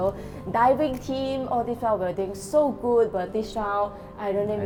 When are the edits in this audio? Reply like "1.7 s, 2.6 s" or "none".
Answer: none